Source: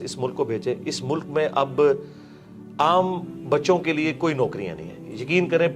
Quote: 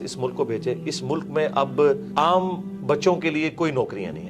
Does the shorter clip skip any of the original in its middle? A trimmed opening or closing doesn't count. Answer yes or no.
yes